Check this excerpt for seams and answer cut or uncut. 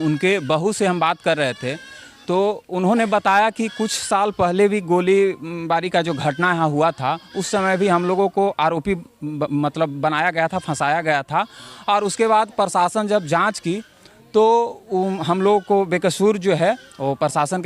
uncut